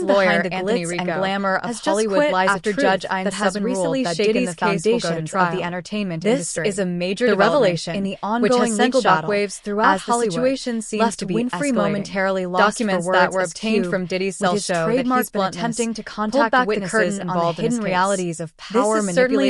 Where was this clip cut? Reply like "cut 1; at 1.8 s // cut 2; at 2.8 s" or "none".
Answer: none